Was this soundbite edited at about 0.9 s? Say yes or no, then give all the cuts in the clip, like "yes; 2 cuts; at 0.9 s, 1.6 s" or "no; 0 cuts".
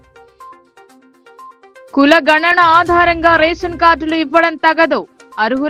no; 0 cuts